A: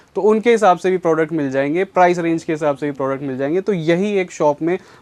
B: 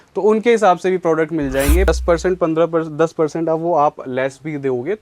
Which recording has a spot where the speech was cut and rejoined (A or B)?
B